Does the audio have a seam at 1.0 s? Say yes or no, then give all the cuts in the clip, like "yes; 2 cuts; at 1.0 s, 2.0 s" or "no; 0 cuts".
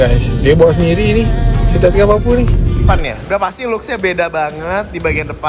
no; 1 cut; at 2.8 s